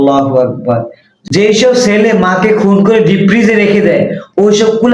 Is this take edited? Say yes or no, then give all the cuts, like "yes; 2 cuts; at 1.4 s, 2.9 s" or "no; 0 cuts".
yes; 1 cut; at 1.2 s